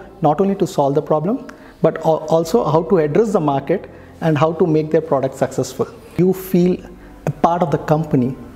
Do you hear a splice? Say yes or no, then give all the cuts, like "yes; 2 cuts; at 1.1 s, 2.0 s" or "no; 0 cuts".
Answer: yes; 1 cut; at 6.2 s